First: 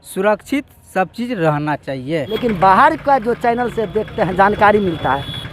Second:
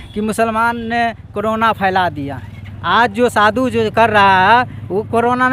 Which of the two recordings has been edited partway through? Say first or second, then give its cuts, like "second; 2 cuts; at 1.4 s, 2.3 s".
first; 1 cut; at 2.3 s